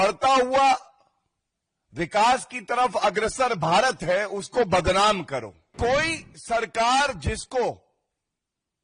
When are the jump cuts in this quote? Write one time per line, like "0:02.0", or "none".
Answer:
0:05.6